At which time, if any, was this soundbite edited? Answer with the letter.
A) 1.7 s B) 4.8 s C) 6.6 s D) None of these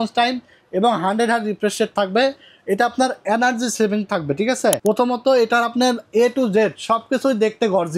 B